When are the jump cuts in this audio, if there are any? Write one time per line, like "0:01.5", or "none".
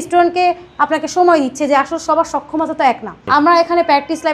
0:03.2